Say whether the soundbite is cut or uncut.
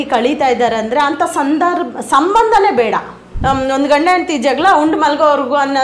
cut